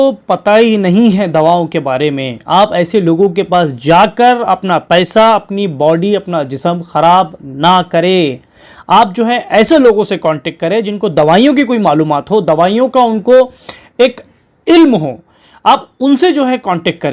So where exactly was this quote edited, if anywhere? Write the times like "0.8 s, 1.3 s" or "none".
none